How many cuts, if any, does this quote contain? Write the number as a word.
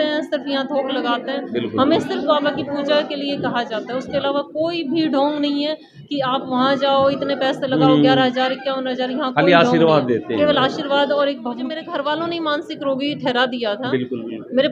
one